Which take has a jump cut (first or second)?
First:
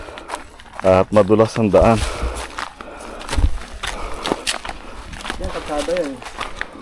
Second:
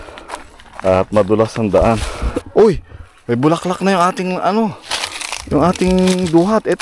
second